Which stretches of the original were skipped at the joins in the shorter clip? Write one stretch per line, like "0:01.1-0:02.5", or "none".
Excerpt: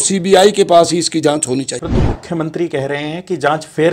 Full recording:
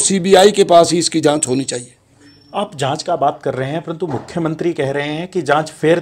0:01.9-0:03.9